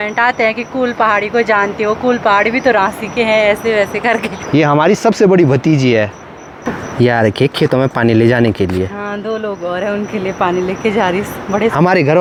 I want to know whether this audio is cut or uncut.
uncut